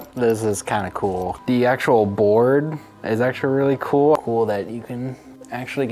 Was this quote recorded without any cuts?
yes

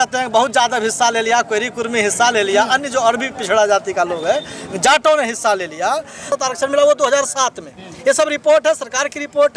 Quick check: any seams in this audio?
yes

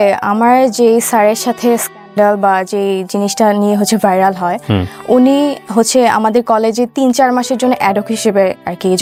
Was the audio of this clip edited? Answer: no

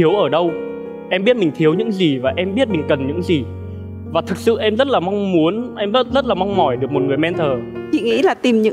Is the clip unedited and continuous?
no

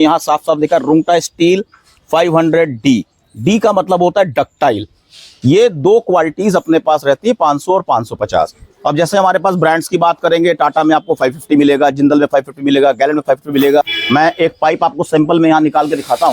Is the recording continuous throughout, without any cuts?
no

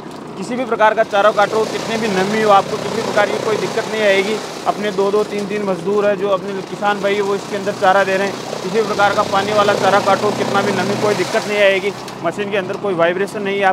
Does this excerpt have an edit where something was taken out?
no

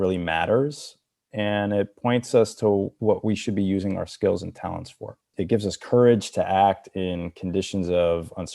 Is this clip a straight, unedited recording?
no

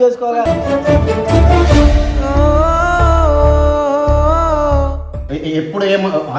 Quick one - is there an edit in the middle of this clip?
yes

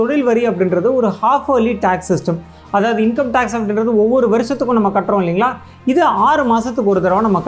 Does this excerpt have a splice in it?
no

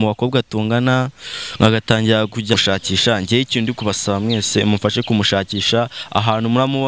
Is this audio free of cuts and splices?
no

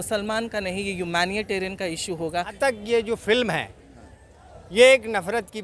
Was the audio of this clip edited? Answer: yes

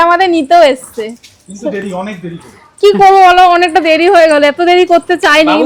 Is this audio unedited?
yes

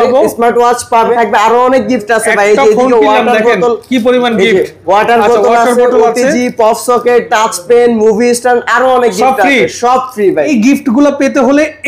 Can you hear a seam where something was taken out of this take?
yes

